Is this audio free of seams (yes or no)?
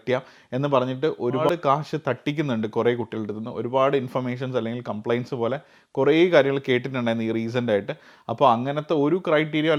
yes